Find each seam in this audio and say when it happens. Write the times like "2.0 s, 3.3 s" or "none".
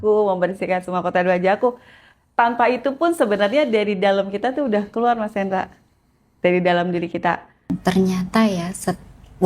7.7 s